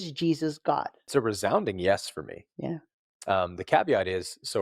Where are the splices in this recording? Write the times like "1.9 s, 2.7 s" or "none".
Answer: 1.1 s

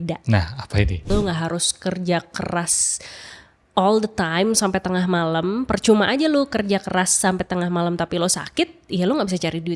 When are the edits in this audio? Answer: 1.0 s

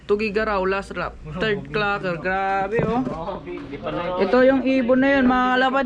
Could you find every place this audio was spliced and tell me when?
none

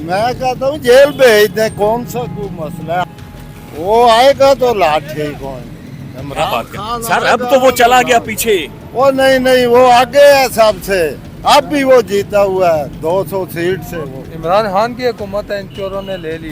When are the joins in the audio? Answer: 3.0 s, 14.3 s

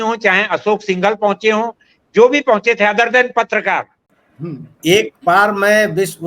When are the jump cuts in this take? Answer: 4.0 s

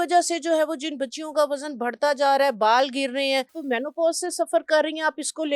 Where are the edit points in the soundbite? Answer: 3.6 s

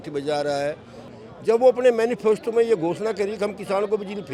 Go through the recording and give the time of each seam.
1.1 s

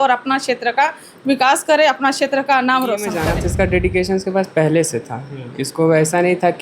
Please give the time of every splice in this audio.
3.2 s

